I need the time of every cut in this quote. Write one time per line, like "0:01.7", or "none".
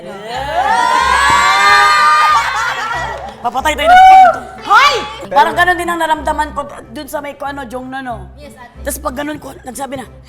0:05.2